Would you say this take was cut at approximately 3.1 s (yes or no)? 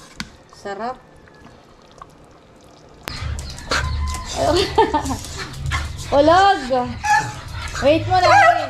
yes